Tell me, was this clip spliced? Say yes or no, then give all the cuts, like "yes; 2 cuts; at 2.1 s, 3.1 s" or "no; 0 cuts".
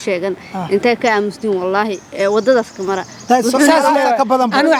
no; 0 cuts